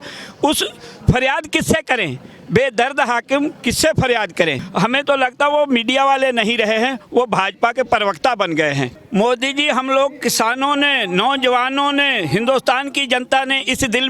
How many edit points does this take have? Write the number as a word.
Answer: two